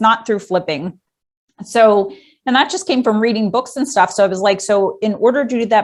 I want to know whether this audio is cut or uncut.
uncut